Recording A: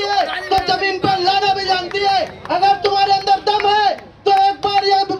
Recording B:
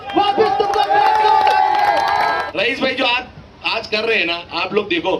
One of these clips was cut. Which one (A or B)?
B